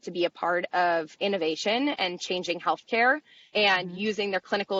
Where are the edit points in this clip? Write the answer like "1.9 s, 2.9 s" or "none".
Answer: none